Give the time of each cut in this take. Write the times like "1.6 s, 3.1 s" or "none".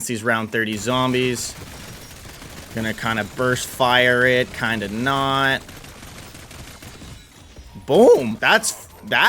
none

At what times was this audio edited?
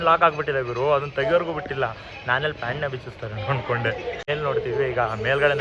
4.2 s

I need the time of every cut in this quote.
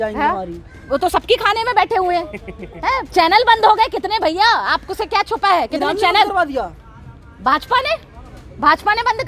none

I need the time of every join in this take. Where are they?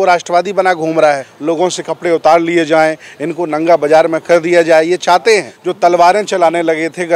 1.3 s, 5.6 s

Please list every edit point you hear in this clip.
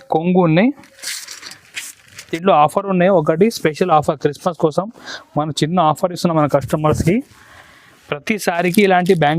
2.3 s

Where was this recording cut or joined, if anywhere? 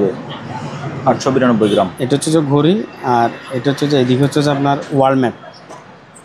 none

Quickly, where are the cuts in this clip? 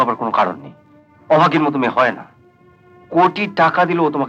none

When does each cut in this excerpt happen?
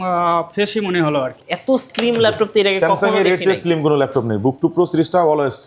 1.5 s

